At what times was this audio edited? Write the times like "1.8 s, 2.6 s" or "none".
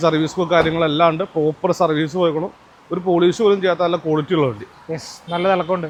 none